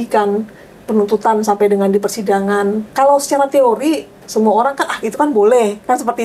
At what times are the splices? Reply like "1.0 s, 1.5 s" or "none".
2.8 s